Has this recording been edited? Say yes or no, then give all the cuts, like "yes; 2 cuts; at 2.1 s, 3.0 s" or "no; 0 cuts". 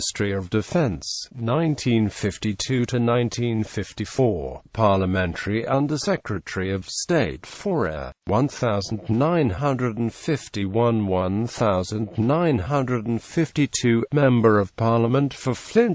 yes; 1 cut; at 3.0 s